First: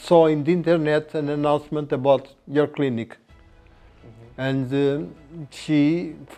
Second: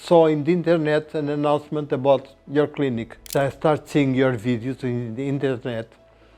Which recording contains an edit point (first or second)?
second